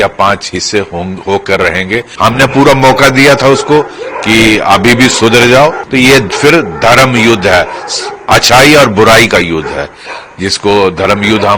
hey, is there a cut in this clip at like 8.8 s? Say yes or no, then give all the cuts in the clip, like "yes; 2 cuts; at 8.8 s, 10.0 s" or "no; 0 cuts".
no; 2 cuts; at 2.1 s, 5.8 s